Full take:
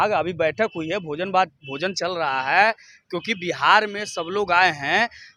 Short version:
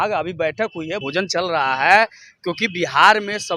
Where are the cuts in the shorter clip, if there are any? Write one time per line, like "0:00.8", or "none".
0:01.0